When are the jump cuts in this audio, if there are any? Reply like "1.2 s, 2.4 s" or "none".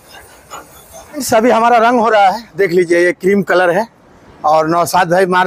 1.2 s

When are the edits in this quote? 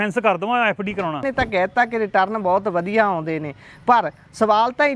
1.3 s

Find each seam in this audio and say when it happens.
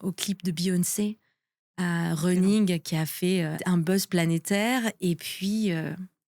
3.6 s

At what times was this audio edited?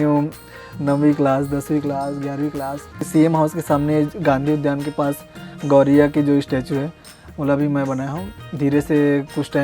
3.1 s, 8.4 s

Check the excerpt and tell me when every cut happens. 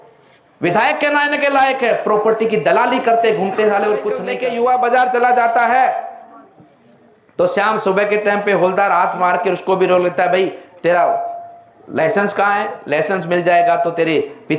4.3 s

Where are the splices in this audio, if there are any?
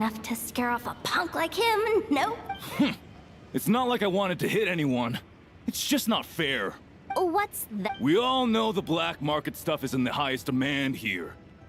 2.5 s, 6.9 s, 7.9 s

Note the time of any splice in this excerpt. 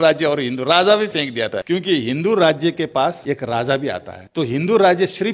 1.6 s, 3.2 s, 4.1 s

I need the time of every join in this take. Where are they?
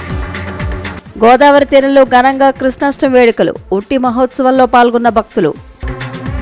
0.9 s

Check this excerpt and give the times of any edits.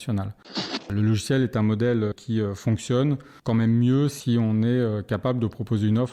0.9 s, 2.2 s, 3.3 s

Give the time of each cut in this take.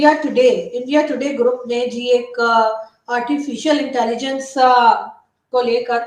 none

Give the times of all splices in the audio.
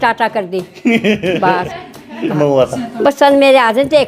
2.3 s

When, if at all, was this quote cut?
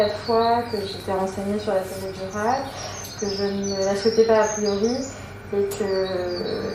none

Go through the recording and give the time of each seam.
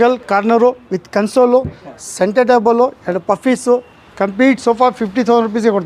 none

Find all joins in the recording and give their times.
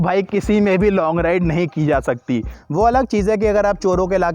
2.5 s

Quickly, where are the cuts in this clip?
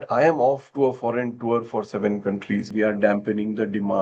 2.7 s

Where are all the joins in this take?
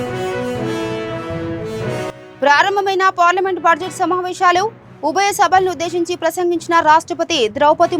2.2 s

